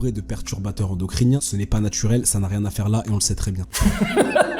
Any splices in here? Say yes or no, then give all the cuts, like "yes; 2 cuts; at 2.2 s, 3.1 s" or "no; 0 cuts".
yes; 2 cuts; at 1.4 s, 3.6 s